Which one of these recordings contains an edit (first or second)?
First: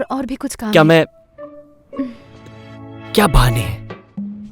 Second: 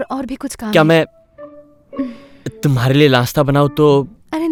first